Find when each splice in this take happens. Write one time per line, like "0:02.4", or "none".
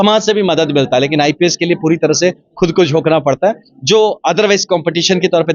none